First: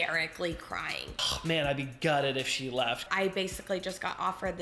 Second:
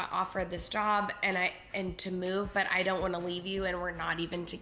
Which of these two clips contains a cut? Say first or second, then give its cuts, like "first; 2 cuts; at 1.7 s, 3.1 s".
first; 2 cuts; at 1.1 s, 3.1 s